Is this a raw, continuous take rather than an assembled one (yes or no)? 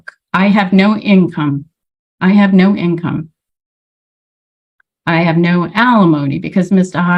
yes